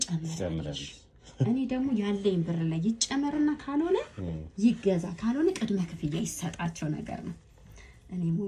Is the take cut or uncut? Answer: uncut